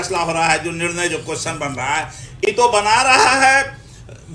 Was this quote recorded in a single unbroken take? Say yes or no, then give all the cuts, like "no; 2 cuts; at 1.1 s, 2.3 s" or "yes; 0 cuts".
yes; 0 cuts